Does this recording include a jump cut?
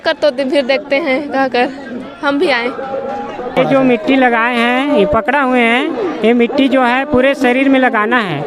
yes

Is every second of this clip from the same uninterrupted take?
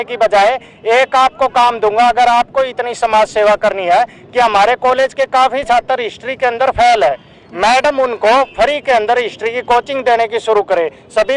yes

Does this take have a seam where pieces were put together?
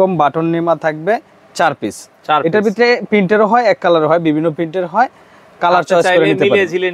no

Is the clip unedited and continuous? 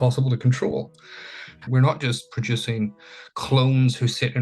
no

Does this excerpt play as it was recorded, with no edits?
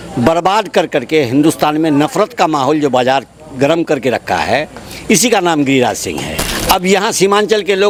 yes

